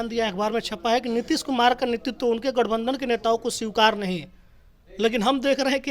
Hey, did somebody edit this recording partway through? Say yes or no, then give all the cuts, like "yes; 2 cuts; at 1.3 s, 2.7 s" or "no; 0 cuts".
no; 0 cuts